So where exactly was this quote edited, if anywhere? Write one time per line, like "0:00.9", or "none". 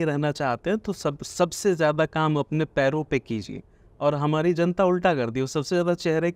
none